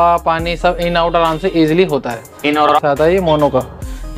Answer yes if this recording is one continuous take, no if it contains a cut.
no